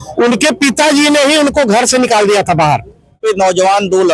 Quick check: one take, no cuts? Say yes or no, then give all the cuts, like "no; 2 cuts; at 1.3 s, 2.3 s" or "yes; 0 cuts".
no; 1 cut; at 3.2 s